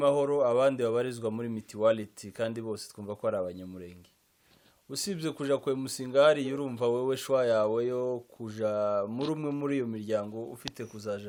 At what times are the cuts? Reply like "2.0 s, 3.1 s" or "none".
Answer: none